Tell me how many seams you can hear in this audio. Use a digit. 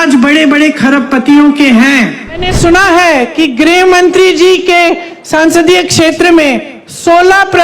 1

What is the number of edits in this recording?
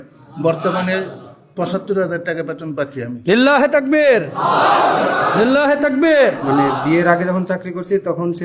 1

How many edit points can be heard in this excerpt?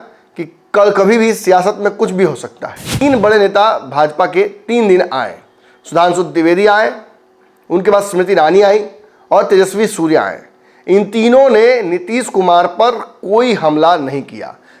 1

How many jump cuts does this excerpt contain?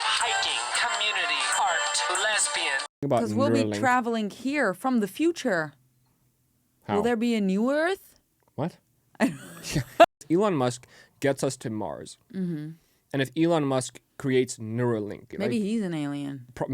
3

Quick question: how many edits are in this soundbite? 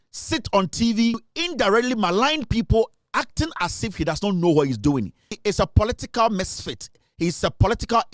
2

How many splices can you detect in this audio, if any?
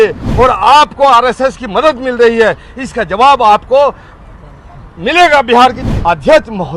1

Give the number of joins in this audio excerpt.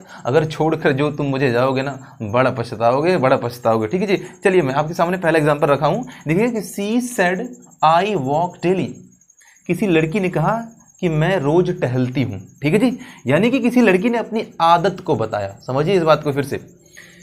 0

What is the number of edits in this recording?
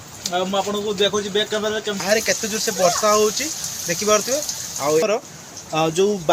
2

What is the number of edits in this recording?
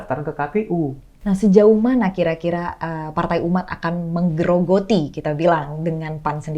1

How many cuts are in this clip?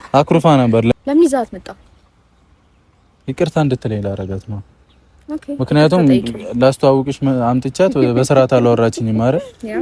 1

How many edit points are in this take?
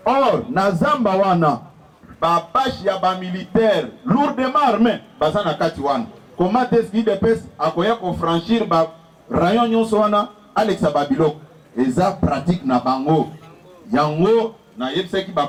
0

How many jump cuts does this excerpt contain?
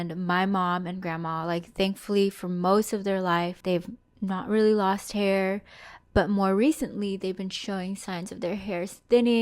1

